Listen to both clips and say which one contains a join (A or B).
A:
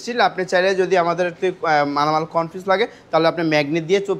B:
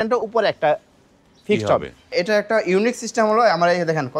B